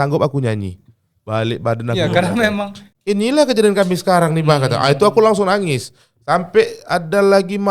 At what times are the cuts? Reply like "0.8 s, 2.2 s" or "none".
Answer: 2.9 s